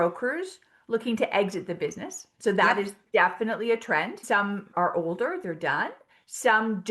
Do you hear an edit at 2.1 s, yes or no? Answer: no